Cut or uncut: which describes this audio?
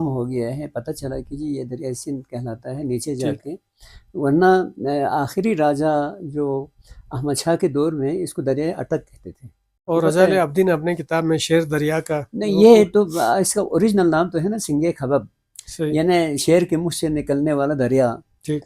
cut